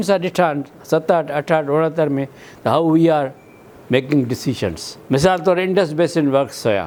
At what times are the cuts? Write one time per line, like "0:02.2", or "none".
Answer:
none